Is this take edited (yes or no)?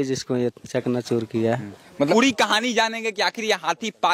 yes